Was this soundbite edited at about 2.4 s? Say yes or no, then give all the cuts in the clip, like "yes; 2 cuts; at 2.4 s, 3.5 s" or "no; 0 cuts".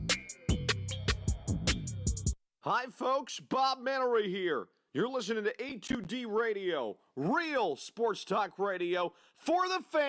yes; 1 cut; at 2.4 s